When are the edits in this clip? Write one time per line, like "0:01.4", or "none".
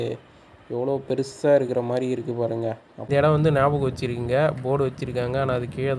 0:03.1